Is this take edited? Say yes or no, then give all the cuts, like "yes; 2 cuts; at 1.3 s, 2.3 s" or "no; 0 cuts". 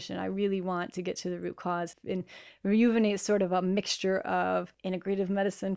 yes; 2 cuts; at 1.9 s, 4.7 s